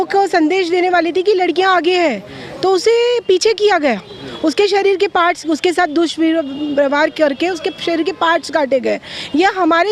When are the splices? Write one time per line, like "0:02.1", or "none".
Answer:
none